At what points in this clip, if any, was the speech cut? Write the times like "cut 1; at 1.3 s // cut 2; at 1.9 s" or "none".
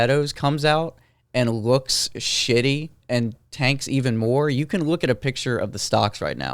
none